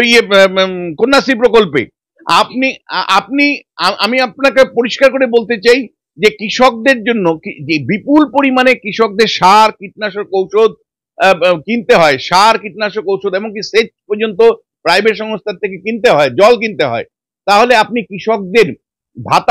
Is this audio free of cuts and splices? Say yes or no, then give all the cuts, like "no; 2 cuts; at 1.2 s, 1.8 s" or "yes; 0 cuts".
yes; 0 cuts